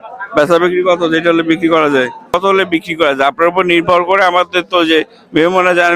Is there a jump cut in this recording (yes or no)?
yes